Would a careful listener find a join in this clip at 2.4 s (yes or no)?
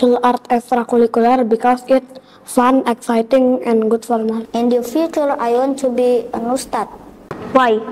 no